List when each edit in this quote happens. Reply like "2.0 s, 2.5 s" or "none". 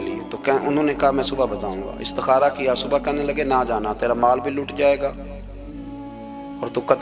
none